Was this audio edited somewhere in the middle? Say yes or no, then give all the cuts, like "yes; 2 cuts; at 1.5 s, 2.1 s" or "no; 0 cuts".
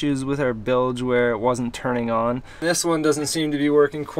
yes; 1 cut; at 2.6 s